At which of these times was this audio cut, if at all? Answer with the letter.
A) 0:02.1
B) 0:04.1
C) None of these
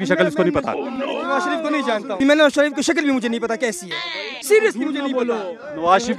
A